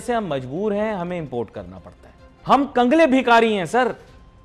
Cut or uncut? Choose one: cut